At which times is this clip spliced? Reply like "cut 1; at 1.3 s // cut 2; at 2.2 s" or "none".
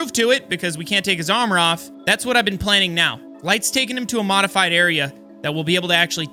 none